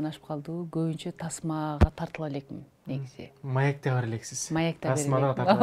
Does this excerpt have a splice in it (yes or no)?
no